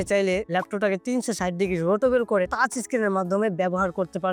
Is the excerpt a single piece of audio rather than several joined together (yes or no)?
yes